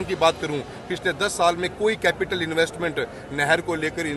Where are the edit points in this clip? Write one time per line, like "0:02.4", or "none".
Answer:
none

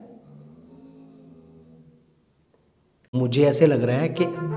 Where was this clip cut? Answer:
0:03.1

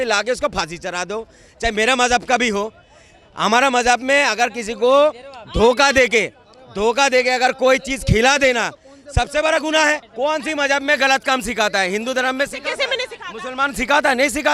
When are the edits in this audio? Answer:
none

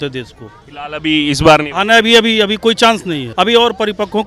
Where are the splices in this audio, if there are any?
0:03.2

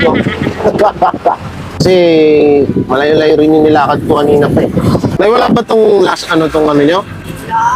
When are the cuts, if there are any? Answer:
0:01.8
0:05.1

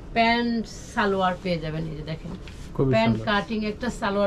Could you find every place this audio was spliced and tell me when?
none

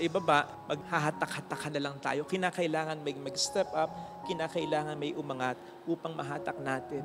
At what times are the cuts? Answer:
none

